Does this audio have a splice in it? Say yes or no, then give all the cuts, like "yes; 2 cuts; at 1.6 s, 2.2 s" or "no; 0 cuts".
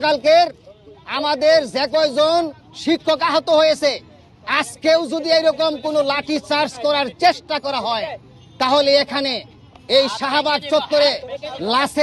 no; 0 cuts